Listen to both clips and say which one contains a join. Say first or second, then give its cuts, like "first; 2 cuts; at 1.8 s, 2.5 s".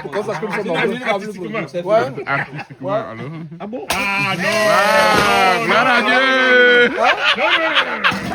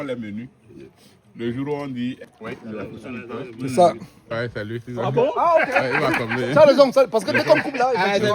second; 2 cuts; at 2.2 s, 4.1 s